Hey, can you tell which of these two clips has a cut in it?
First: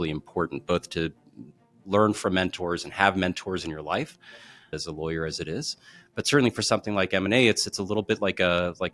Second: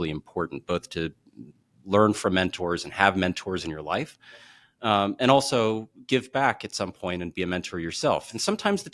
first; 1 cut; at 4.7 s

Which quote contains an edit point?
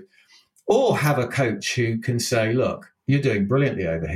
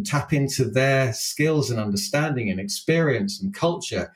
first; 1 cut; at 2.9 s

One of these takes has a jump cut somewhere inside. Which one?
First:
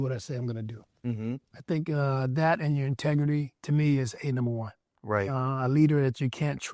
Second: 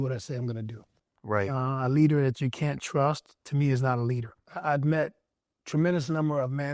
second; 2 cuts; at 0.9 s, 4.5 s

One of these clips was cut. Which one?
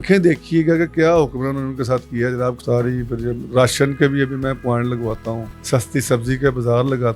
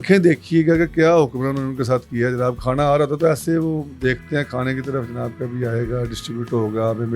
first; 2 cuts; at 2.6 s, 5.5 s

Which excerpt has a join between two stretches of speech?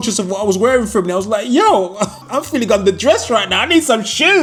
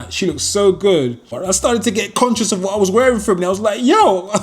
second; 1 cut; at 1.4 s

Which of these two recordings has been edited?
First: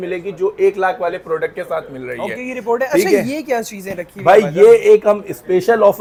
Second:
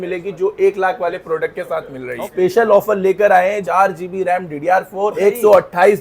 second; 3 cuts; at 2.2 s, 3.6 s, 5.1 s

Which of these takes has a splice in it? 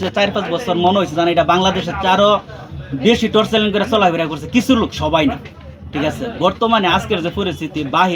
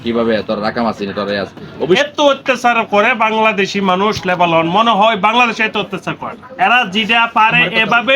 second; 1 cut; at 2.0 s

